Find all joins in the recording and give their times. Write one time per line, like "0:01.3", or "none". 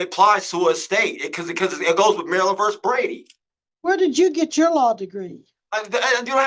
none